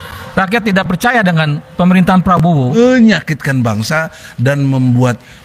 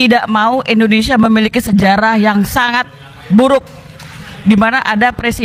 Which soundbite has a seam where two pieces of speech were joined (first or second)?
first